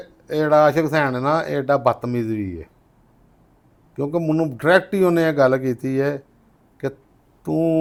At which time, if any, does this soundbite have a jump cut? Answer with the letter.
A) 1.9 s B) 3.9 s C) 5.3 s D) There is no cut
D